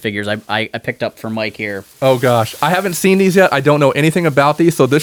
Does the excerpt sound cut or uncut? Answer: uncut